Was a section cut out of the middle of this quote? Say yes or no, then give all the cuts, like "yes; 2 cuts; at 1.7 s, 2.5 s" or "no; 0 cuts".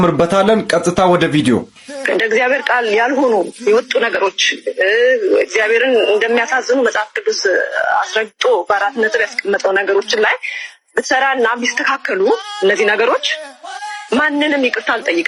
no; 0 cuts